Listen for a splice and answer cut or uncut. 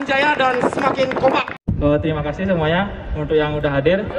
cut